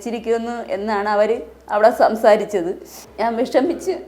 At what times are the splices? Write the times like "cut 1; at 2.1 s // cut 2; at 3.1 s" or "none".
cut 1; at 3.1 s